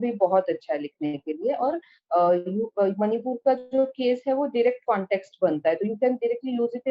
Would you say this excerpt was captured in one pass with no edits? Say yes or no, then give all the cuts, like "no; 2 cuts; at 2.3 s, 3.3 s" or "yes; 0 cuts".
yes; 0 cuts